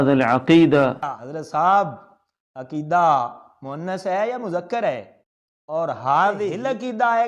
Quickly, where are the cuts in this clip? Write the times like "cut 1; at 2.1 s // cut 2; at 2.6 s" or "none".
cut 1; at 0.9 s